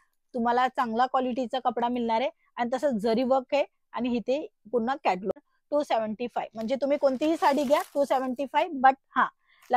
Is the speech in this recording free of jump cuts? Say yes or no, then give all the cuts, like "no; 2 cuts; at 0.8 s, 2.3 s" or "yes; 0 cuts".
no; 1 cut; at 5.3 s